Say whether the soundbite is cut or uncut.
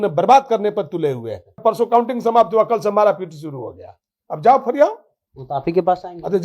cut